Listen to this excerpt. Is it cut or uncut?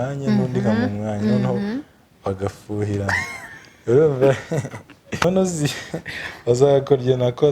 cut